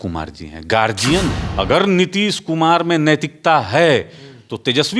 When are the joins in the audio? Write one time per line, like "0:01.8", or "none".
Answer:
0:01.4